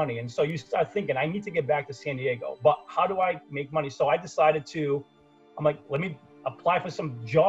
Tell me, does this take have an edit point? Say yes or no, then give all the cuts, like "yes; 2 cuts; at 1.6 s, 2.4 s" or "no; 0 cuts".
no; 0 cuts